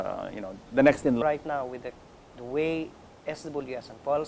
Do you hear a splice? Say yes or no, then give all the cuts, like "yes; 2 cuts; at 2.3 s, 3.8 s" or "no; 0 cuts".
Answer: no; 0 cuts